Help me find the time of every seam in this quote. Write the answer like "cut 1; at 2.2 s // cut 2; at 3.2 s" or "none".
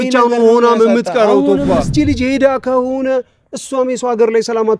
cut 1; at 1.9 s

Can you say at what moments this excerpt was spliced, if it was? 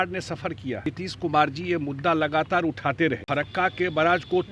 cut 1; at 0.9 s // cut 2; at 3.2 s

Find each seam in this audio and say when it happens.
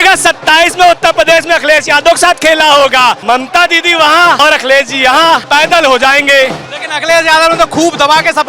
cut 1; at 3.2 s // cut 2; at 4.4 s // cut 3; at 5.4 s

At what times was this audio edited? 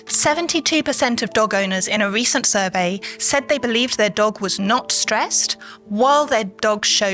none

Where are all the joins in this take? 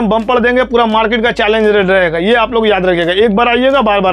none

